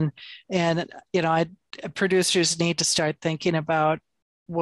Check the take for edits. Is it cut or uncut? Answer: uncut